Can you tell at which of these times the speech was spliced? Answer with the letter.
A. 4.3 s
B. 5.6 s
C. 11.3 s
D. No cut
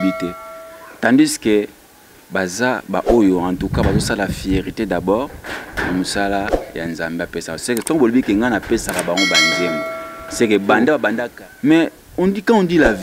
C